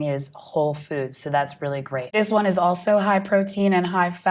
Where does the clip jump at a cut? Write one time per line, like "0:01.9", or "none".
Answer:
0:02.1

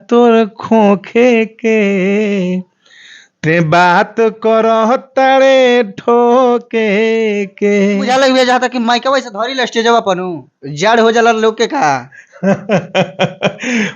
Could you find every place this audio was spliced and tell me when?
0:08.1

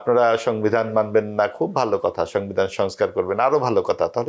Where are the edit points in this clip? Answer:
none

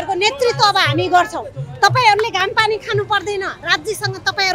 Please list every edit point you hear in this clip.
none

